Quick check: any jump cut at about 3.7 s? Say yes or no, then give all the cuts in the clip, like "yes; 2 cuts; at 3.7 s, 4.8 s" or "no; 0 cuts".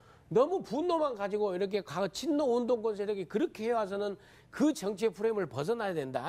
yes; 1 cut; at 3.7 s